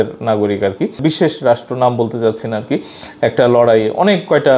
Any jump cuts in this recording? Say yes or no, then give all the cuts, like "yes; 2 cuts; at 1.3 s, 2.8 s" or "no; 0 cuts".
yes; 1 cut; at 0.9 s